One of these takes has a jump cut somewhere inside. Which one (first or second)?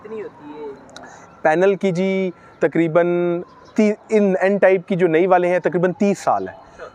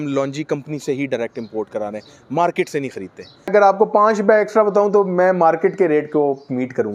second